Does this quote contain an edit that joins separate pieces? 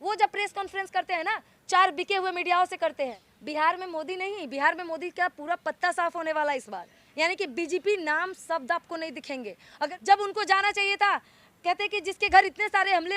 yes; 2 cuts; at 3.3 s, 9.9 s

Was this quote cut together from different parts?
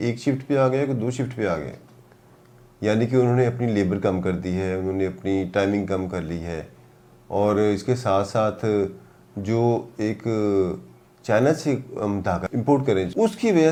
no; 0 cuts

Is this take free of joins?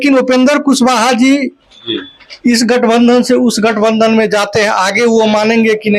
yes; 0 cuts

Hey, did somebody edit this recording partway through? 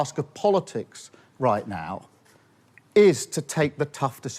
no; 0 cuts

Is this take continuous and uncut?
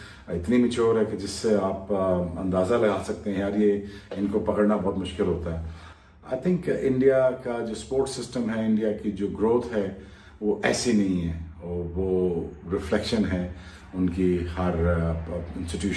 yes; 0 cuts

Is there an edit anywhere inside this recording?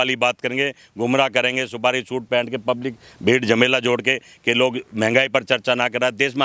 no; 0 cuts

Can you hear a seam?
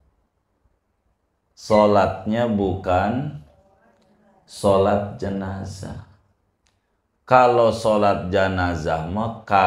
no; 0 cuts

